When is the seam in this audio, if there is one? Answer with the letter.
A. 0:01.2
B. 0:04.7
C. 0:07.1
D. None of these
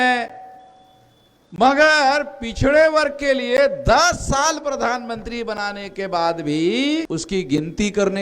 C